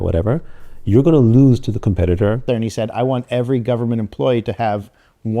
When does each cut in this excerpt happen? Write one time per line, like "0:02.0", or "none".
0:02.4